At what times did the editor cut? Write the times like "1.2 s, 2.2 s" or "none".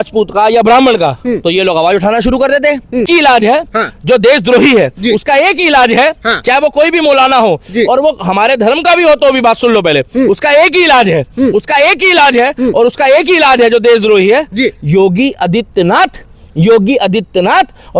3.1 s

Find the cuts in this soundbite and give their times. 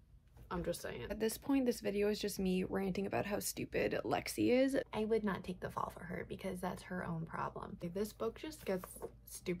1.1 s, 4.9 s, 7.8 s

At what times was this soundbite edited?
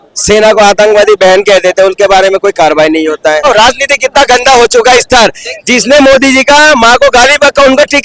3.4 s

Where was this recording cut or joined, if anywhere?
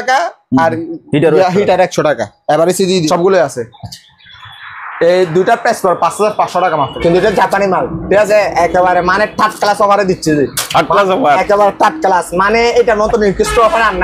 3.1 s, 6.9 s

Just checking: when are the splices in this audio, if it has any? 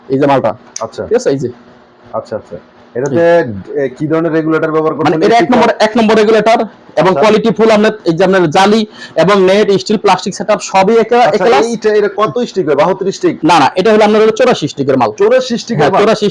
none

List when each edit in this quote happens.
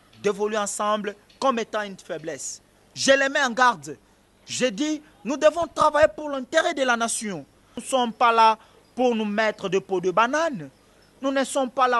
7.8 s

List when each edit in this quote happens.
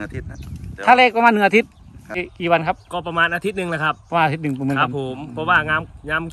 2.3 s

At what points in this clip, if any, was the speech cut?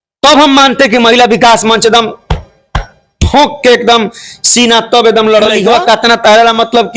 5.6 s

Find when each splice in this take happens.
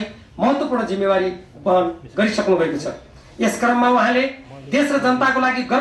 none

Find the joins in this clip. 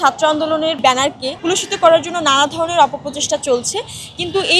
0.9 s

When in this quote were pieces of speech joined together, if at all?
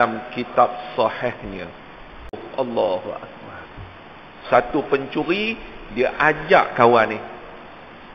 2.5 s

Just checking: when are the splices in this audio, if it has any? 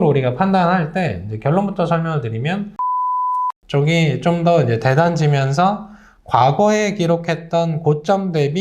3.0 s

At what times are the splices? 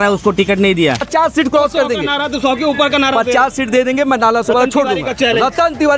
1.0 s

